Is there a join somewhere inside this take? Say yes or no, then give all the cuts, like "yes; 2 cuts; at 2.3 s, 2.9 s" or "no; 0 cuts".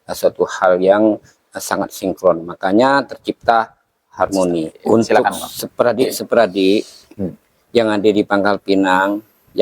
yes; 1 cut; at 4.9 s